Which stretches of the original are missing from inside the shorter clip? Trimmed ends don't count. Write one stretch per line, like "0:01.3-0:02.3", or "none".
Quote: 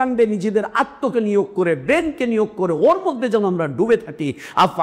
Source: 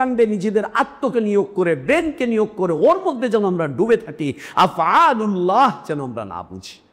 none